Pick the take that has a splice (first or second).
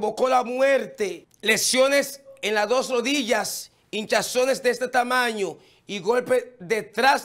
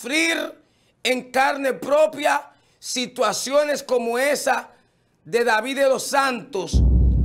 first